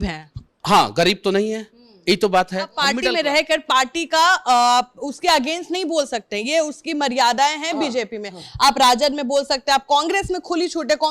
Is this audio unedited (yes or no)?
no